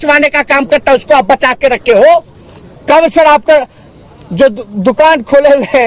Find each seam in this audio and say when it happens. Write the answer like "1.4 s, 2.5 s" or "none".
none